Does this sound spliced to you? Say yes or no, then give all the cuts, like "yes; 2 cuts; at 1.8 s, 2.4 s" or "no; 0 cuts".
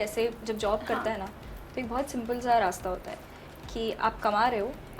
no; 0 cuts